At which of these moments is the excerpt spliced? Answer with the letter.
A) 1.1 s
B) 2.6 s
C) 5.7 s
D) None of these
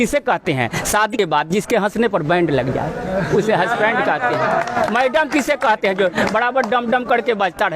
A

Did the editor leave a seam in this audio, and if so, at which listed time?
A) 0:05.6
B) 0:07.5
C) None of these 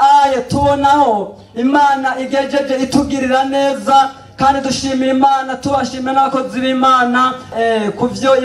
B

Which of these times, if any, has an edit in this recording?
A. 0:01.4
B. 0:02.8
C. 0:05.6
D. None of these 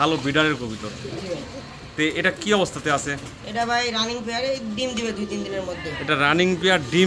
D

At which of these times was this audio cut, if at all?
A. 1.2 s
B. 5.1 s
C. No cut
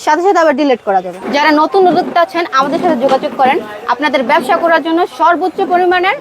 A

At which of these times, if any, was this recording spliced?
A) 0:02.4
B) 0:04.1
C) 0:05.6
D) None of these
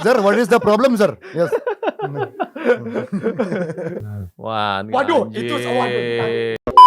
B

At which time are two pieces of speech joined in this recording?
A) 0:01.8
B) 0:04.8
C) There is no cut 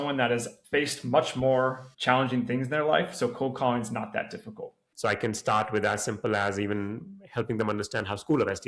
B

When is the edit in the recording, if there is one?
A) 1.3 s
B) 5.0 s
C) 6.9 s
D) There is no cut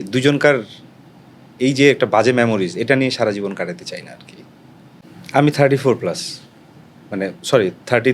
B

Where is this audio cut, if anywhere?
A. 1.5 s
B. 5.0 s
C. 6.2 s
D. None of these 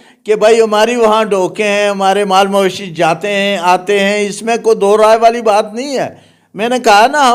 D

